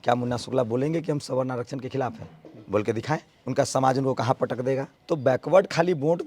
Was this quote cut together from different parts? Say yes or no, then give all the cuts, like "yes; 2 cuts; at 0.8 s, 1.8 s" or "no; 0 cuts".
yes; 2 cuts; at 3.3 s, 4.9 s